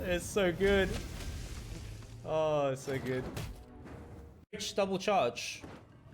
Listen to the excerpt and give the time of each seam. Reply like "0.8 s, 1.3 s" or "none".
4.7 s